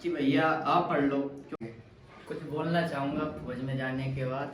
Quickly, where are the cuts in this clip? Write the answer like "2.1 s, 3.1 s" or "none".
1.6 s